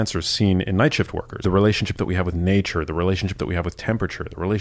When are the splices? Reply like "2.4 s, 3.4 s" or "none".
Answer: 1.4 s